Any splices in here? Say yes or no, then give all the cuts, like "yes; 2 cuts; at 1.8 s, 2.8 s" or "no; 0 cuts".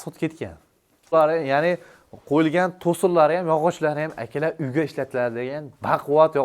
yes; 1 cut; at 1.1 s